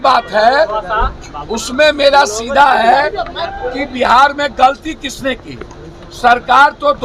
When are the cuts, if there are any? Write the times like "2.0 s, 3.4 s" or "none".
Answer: none